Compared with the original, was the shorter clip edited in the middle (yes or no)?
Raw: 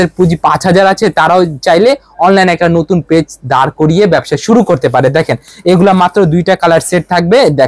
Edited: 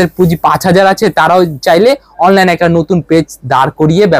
no